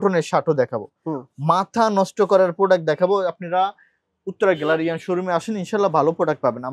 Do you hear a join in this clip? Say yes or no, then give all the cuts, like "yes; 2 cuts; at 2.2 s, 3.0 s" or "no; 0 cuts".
no; 0 cuts